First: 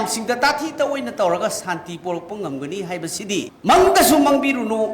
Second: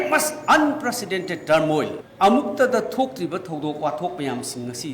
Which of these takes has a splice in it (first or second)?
first